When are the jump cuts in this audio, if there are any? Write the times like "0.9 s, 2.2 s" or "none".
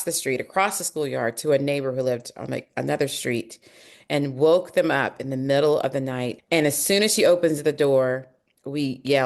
6.4 s